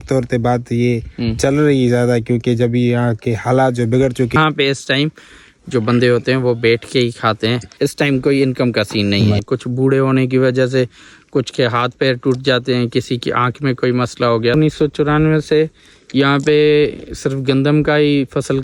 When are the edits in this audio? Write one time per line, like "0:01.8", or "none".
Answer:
0:04.4
0:07.7
0:09.4
0:14.5